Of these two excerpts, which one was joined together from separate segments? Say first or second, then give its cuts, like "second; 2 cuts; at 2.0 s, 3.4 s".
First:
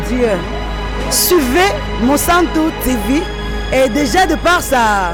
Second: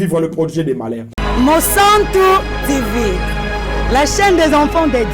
second; 1 cut; at 1.0 s